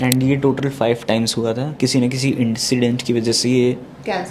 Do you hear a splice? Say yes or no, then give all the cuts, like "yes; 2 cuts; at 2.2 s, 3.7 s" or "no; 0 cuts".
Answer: no; 0 cuts